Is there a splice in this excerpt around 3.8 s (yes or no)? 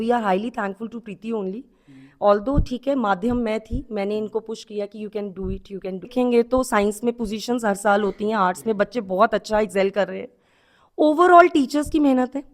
no